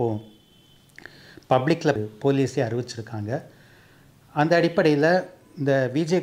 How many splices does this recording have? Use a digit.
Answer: 1